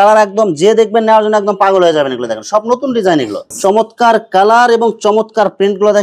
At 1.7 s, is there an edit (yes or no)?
no